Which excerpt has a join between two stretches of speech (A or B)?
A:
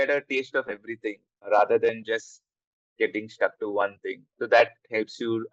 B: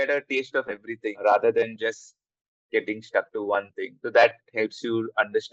B